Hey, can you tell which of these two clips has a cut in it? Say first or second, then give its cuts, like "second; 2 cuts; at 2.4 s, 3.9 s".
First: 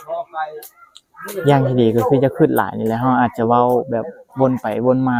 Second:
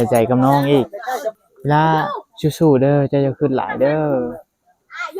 second; 1 cut; at 1.4 s